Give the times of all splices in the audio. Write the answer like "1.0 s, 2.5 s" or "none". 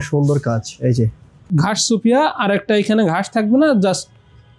1.4 s